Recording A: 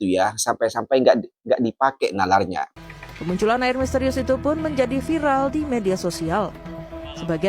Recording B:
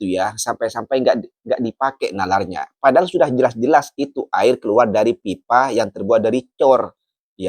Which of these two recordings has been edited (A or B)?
A